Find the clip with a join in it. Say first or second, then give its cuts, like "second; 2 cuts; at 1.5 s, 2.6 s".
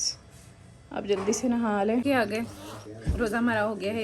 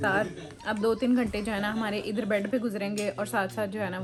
first; 1 cut; at 2.0 s